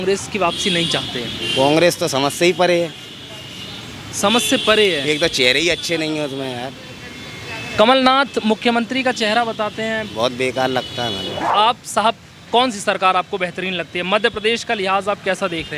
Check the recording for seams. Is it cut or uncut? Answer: uncut